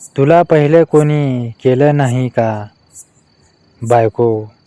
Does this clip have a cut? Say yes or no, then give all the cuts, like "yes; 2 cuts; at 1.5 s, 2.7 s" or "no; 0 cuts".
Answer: no; 0 cuts